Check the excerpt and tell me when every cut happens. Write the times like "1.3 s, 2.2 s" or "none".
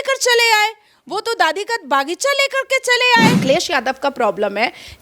3.4 s